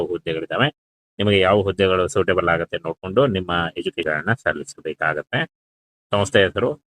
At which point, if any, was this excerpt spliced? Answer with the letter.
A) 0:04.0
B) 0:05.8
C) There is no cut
A